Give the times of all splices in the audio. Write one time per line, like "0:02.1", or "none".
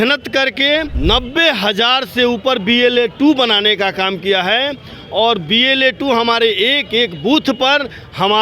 0:00.9